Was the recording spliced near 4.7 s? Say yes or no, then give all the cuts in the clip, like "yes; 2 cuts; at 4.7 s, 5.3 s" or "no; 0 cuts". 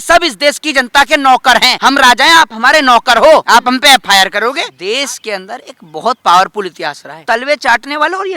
yes; 4 cuts; at 1.7 s, 3.5 s, 4.7 s, 7.1 s